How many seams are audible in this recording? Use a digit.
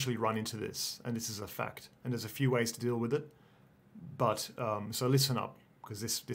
0